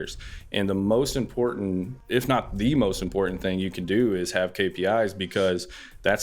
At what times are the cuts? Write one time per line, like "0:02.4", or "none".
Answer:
0:02.0